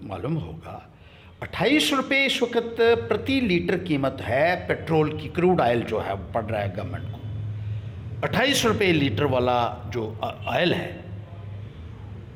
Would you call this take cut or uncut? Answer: uncut